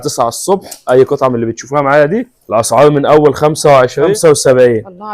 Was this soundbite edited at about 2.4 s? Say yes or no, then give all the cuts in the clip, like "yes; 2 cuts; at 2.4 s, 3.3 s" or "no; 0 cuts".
yes; 2 cuts; at 2.4 s, 4.1 s